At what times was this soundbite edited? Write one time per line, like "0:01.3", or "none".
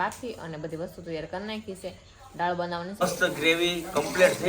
0:03.0